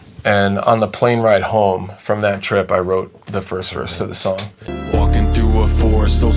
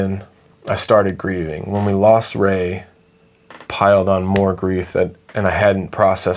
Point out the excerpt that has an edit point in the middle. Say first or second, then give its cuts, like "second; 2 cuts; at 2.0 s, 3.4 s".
first; 1 cut; at 4.5 s